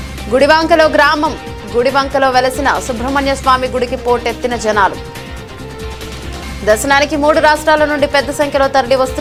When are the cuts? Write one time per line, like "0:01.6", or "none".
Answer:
none